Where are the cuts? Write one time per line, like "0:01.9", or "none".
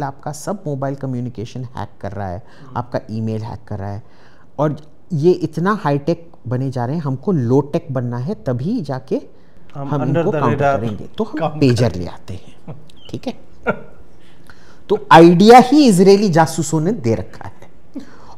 none